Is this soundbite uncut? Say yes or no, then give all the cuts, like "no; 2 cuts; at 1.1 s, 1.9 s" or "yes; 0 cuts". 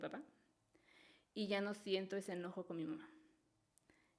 yes; 0 cuts